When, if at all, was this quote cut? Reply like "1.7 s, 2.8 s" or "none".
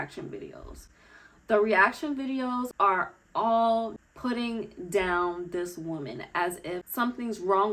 2.7 s, 4.0 s, 6.9 s